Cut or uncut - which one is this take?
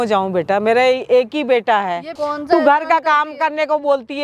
cut